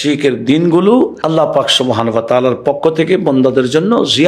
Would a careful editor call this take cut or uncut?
cut